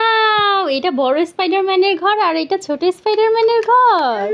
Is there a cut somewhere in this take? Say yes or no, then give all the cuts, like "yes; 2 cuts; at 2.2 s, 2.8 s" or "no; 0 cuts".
no; 0 cuts